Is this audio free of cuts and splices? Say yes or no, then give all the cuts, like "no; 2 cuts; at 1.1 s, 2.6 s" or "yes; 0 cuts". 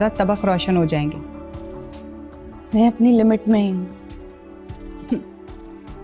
yes; 0 cuts